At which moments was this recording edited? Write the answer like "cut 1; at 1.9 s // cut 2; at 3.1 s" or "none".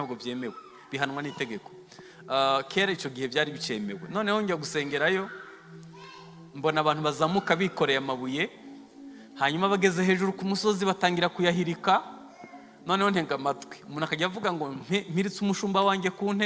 none